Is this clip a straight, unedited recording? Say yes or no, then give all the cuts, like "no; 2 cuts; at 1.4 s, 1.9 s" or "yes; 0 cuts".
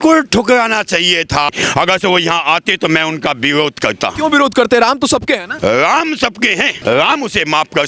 no; 4 cuts; at 1.5 s, 4.1 s, 5.5 s, 6.7 s